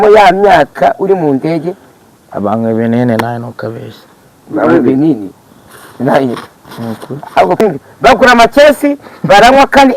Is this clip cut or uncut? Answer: cut